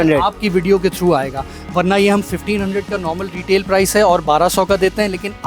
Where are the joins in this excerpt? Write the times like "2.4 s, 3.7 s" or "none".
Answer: none